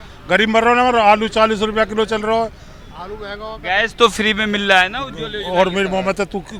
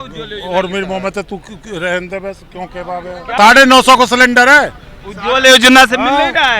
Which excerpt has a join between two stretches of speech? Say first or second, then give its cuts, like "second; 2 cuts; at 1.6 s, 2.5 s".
second; 1 cut; at 3.2 s